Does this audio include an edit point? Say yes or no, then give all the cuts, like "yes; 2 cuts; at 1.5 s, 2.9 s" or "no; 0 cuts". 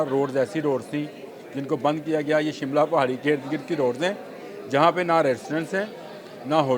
no; 0 cuts